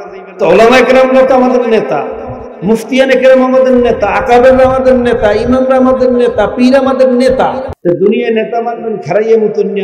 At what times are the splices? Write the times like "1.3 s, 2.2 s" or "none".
7.6 s